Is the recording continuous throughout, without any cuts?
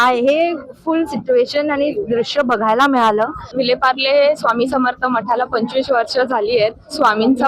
no; 1 cut; at 3.5 s

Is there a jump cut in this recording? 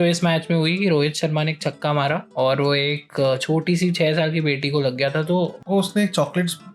yes; 2 cuts; at 2.3 s, 5.6 s

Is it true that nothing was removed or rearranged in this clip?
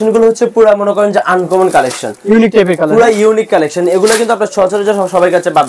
yes; 0 cuts

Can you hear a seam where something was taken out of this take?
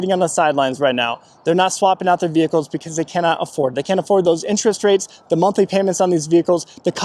no; 0 cuts

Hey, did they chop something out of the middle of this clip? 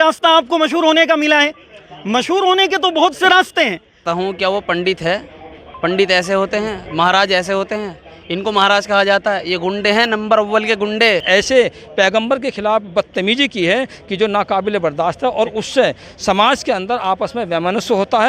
yes; 2 cuts; at 4.0 s, 11.2 s

